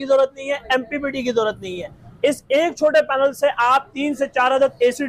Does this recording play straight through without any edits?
yes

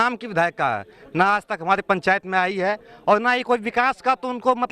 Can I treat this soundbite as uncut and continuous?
yes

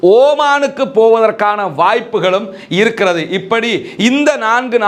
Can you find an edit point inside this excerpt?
no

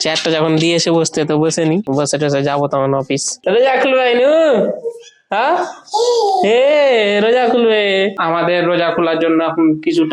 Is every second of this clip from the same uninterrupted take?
no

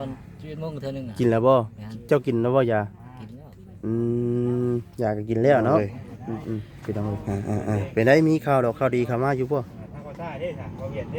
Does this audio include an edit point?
yes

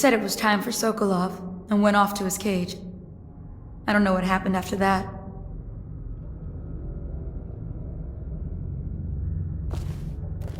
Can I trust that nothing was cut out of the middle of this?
no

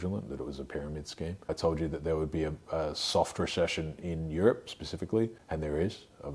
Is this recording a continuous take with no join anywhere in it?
no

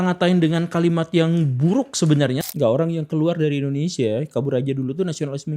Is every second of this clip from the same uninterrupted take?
no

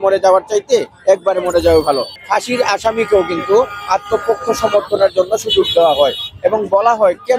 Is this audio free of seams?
no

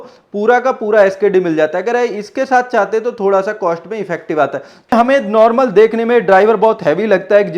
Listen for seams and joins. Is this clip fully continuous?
no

